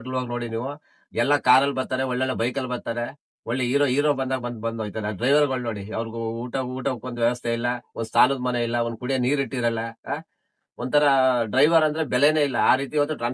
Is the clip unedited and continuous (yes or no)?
yes